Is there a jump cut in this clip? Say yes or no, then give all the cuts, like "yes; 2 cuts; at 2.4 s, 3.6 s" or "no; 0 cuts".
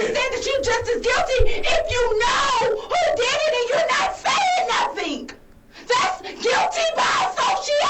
no; 0 cuts